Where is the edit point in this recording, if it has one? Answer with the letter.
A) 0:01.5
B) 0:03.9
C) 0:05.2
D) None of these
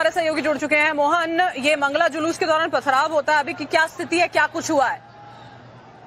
D